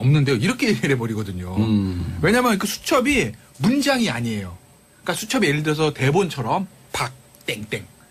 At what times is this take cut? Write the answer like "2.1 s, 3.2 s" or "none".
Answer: 4.1 s